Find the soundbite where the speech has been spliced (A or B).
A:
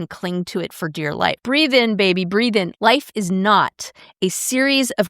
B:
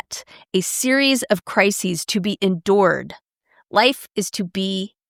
A